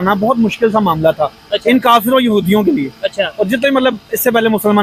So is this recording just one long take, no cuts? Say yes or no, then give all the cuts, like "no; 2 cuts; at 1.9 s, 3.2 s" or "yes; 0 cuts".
yes; 0 cuts